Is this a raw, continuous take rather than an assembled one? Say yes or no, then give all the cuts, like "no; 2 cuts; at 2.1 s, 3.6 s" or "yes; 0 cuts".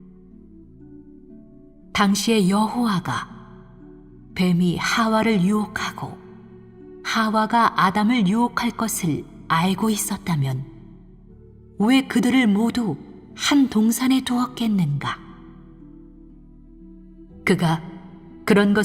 no; 1 cut; at 11.7 s